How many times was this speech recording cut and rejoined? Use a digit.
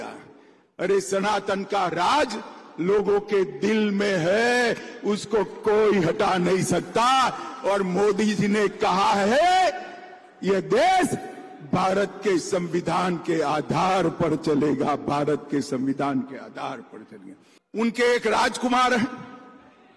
0